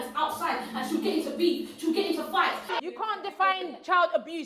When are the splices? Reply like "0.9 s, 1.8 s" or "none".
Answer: 2.7 s